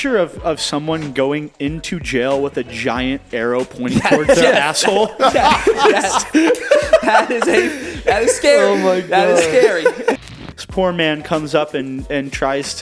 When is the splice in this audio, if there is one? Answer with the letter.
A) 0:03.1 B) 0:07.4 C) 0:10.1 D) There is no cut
C